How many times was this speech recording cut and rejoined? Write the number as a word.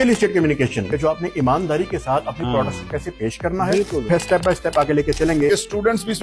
three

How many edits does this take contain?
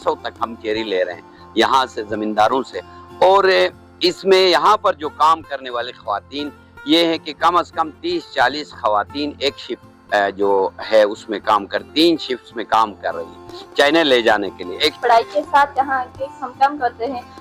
one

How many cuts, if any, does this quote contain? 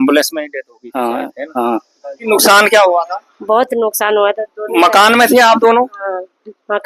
one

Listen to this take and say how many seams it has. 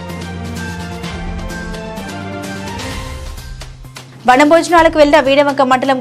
zero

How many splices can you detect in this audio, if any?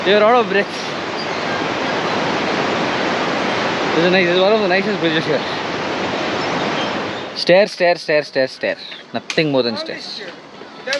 one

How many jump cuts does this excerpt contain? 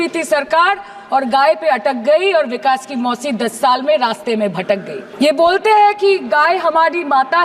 one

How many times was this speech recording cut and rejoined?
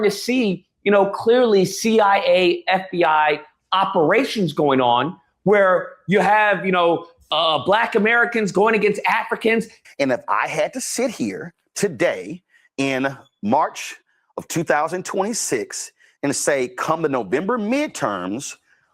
one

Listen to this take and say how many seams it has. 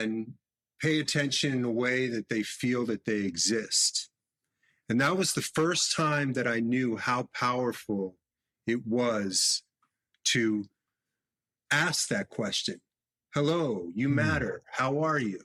zero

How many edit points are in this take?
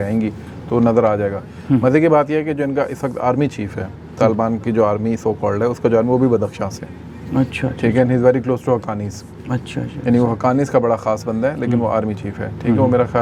zero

